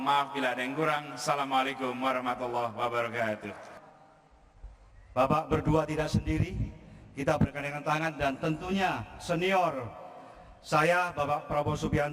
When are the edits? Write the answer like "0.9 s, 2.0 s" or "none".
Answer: 3.8 s